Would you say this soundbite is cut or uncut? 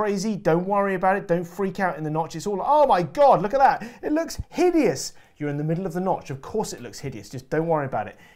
uncut